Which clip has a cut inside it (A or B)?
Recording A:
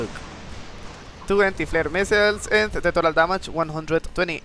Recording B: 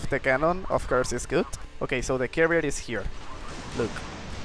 B